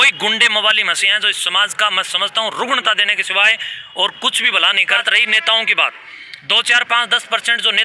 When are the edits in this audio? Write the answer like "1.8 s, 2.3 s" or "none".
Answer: 5.0 s